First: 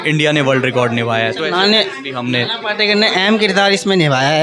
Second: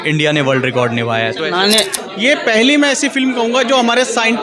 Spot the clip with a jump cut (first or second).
second